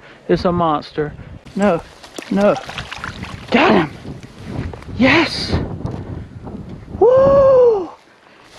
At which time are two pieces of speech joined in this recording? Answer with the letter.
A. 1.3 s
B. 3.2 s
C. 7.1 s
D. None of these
A